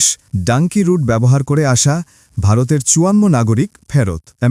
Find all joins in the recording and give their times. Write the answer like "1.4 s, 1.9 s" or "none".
none

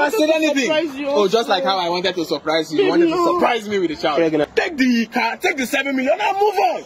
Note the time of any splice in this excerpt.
4.4 s

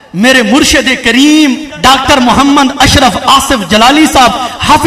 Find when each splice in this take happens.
1.7 s

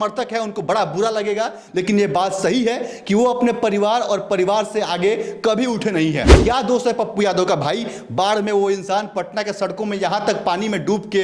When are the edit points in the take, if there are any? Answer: 6.3 s

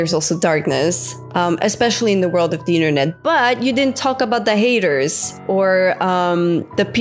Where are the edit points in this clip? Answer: none

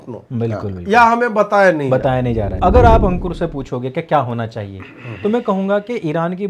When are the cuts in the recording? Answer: 2.5 s

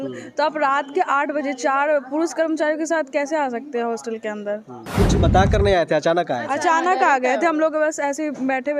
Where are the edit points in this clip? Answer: 4.8 s

